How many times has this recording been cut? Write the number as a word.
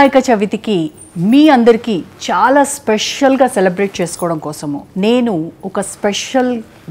zero